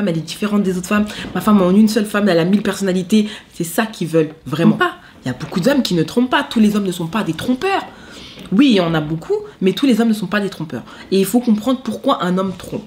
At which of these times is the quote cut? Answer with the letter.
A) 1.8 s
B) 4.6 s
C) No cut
B